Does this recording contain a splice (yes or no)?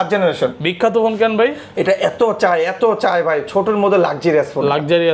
no